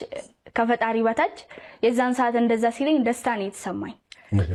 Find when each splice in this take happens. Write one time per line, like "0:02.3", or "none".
none

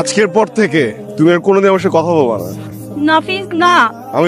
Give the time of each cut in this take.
0:01.0

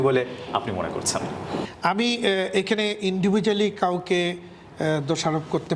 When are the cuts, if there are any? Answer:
none

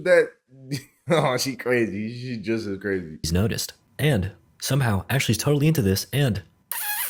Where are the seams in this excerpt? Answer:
none

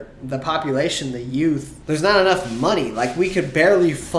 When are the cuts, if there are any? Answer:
0:01.7

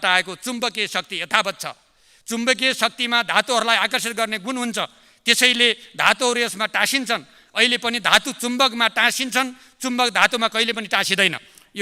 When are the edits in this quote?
none

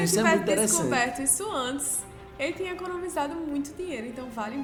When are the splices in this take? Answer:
none

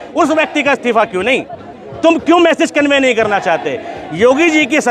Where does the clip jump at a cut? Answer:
none

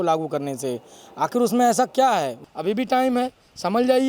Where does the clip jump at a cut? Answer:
0:02.4

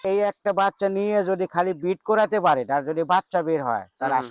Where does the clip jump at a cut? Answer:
none

